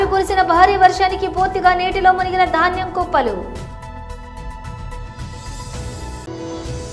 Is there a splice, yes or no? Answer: yes